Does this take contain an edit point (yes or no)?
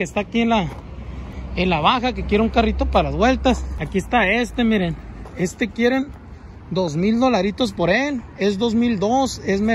yes